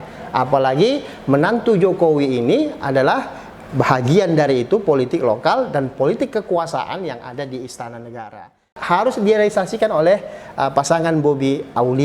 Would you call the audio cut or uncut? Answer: cut